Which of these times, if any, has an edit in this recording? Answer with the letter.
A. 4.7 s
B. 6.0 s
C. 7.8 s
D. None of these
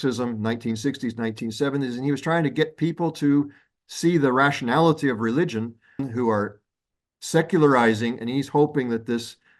B